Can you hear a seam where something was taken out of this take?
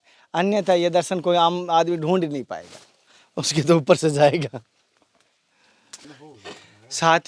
no; 0 cuts

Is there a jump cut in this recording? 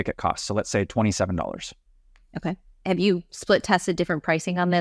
no; 0 cuts

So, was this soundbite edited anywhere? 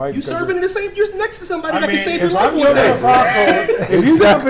no; 0 cuts

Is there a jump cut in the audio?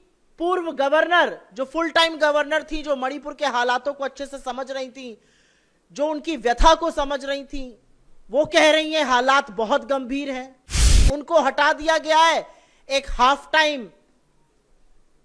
no; 0 cuts

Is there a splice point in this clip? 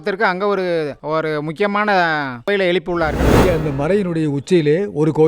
yes; 1 cut; at 3.4 s

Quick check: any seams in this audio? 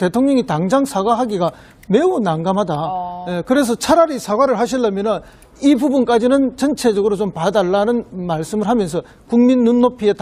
yes; 1 cut; at 4.2 s

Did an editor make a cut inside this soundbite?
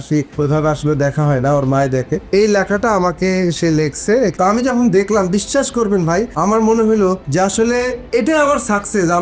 yes; 2 cuts; at 2.2 s, 4.3 s

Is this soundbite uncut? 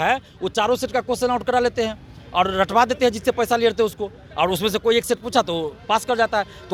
yes; 0 cuts

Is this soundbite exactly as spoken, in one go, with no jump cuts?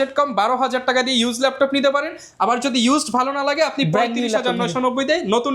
yes; 0 cuts

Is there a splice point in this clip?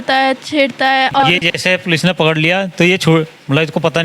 yes; 1 cut; at 1.2 s

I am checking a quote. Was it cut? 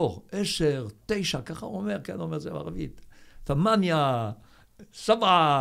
no; 0 cuts

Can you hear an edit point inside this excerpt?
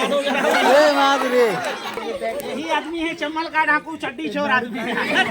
yes; 1 cut; at 2.0 s

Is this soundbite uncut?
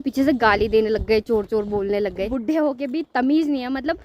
no; 1 cut; at 2.3 s

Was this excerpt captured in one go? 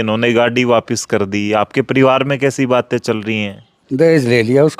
no; 1 cut; at 3.8 s

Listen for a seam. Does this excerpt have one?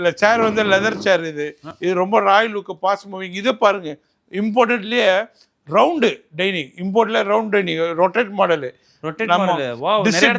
no; 0 cuts

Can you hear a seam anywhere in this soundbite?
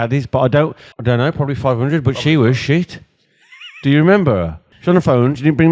yes; 2 cuts; at 0.9 s, 4.7 s

